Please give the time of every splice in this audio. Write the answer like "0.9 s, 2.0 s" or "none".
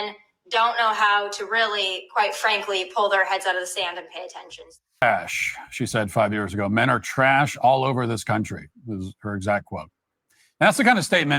5.0 s